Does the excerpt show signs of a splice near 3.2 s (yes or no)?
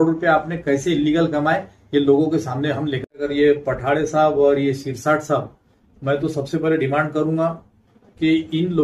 yes